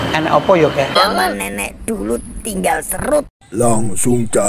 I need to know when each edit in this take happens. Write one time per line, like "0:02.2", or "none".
0:01.0